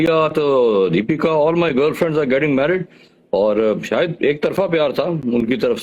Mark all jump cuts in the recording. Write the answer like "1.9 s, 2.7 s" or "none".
none